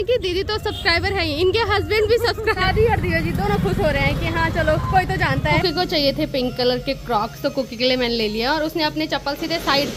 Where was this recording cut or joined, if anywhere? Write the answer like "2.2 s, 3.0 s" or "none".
2.6 s, 5.6 s